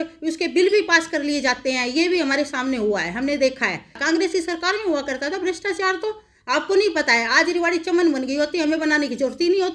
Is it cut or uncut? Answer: cut